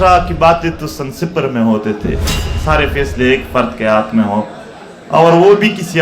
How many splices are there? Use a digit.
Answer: 1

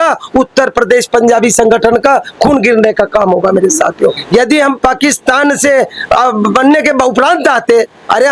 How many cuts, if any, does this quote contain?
1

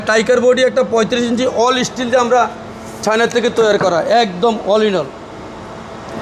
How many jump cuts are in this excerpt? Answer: 0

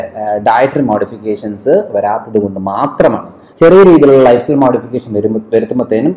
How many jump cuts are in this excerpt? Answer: 1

